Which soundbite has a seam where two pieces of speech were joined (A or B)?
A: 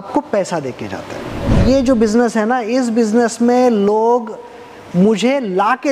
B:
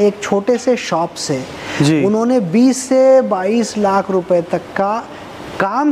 A